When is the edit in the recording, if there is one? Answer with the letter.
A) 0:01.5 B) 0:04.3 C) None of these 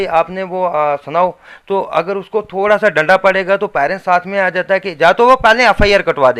C